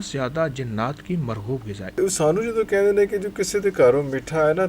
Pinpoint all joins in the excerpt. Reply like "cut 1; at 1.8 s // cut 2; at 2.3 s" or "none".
cut 1; at 2.0 s